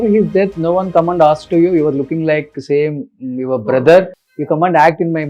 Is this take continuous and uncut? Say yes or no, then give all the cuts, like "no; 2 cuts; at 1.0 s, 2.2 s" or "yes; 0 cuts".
yes; 0 cuts